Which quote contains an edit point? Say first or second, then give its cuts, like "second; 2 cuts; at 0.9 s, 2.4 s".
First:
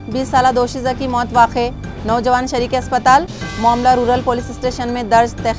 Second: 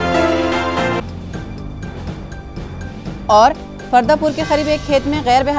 second; 1 cut; at 1.1 s